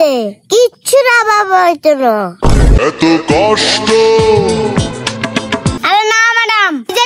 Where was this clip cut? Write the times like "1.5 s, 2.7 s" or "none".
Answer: 5.8 s